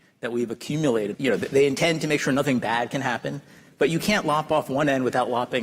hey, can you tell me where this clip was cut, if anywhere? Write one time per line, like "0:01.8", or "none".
0:01.2